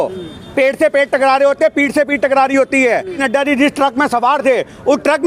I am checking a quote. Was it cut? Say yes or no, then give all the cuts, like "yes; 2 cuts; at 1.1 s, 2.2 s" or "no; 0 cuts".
yes; 1 cut; at 3.2 s